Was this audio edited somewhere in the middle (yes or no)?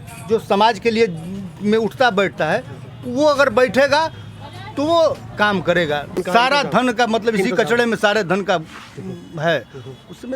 yes